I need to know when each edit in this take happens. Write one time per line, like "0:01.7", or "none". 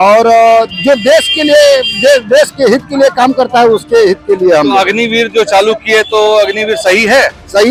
none